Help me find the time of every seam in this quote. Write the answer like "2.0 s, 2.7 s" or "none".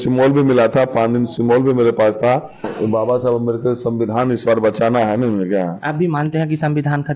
2.7 s